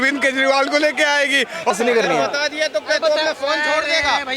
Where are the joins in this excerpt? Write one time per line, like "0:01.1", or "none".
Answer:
0:01.7